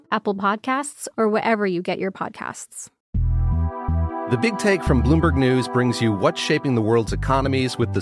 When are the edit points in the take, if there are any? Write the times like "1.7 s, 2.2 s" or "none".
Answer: 2.9 s